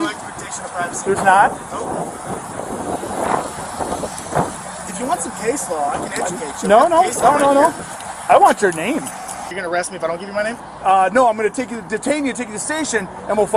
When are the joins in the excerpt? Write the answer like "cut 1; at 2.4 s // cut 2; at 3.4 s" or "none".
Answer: cut 1; at 9.5 s

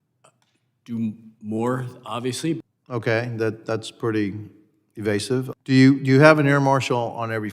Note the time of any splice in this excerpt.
cut 1; at 2.6 s // cut 2; at 5.5 s

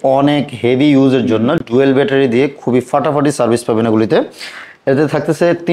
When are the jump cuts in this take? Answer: none

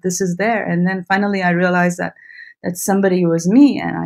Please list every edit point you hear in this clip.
none

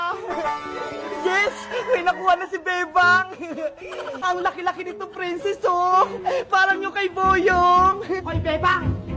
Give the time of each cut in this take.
cut 1; at 8.2 s

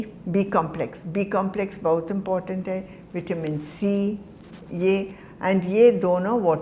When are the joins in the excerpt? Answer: none

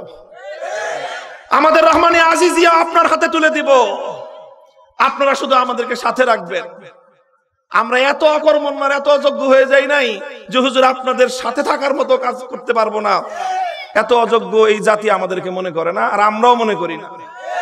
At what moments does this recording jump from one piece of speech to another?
none

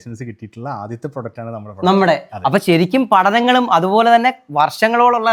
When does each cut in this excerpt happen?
none

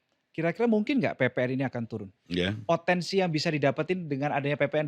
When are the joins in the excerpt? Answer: cut 1; at 2.2 s

